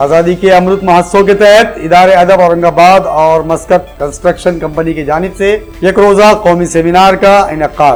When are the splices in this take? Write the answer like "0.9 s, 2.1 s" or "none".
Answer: none